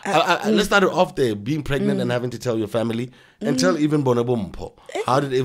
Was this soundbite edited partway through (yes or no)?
no